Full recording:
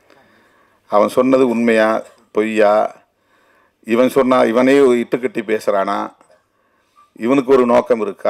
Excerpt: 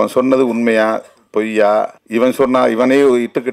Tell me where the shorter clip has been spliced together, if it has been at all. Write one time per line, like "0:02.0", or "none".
0:02.0